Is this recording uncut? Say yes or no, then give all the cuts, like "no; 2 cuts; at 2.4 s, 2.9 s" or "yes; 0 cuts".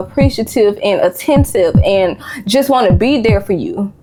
yes; 0 cuts